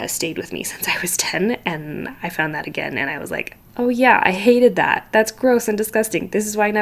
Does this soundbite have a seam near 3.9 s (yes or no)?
no